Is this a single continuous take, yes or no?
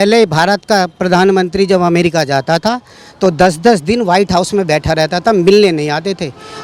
yes